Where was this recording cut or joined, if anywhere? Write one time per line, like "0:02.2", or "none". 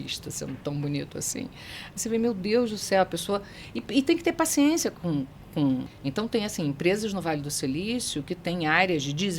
0:05.9